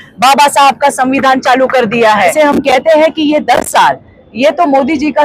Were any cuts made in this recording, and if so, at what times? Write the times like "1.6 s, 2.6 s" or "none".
2.3 s

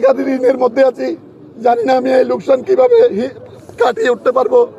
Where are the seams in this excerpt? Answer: none

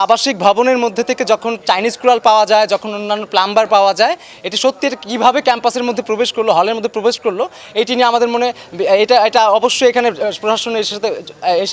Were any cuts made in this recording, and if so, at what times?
none

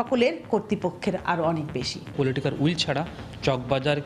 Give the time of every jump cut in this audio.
2.1 s

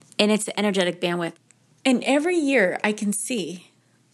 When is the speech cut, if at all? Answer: 1.3 s

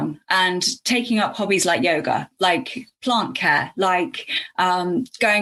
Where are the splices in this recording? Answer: none

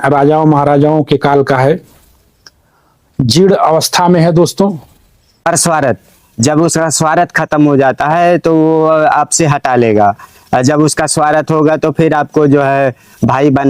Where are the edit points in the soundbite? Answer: 5.3 s

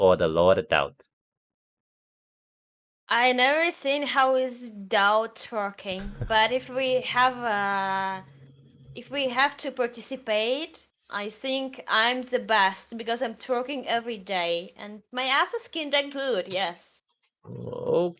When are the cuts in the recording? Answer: none

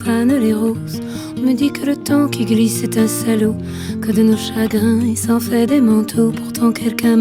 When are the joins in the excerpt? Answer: none

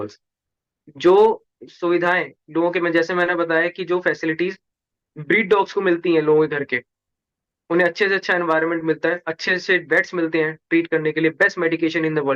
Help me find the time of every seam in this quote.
none

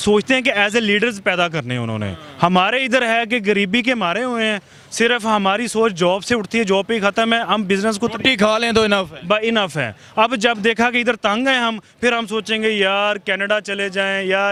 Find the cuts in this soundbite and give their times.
none

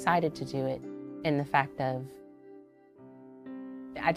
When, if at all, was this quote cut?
none

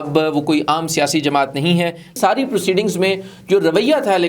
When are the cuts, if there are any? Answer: 2.1 s

